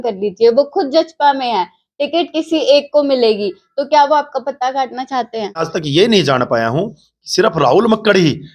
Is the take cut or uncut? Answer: cut